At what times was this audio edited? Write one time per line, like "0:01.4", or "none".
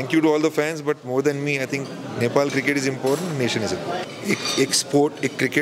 0:04.0